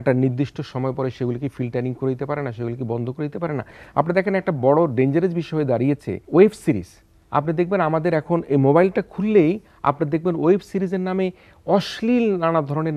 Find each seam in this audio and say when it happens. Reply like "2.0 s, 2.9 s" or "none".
3.8 s, 6.1 s